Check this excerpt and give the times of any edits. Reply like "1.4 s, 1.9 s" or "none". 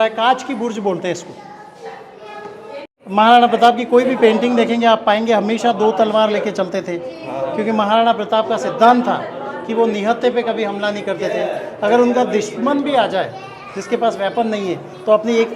2.9 s